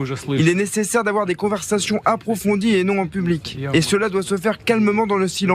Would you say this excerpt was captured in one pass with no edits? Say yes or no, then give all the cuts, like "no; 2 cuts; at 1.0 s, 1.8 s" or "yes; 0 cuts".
yes; 0 cuts